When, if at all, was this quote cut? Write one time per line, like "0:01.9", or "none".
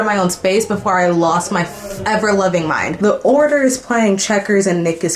0:02.9